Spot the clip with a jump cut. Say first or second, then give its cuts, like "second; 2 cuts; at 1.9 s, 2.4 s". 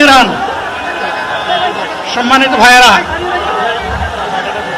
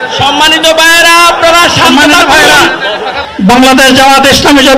second; 1 cut; at 3.2 s